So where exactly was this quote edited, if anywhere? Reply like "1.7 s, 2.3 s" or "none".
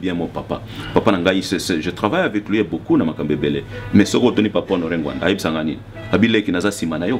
none